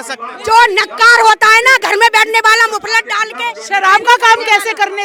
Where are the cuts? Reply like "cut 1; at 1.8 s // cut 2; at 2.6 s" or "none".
none